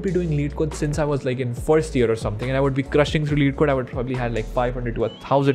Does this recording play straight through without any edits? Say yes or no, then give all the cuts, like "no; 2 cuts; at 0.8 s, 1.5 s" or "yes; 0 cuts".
yes; 0 cuts